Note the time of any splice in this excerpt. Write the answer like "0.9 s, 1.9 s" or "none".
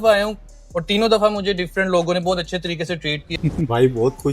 3.2 s